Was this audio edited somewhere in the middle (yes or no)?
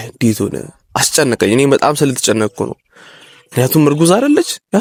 no